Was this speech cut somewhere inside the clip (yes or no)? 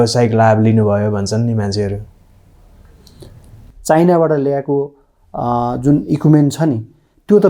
yes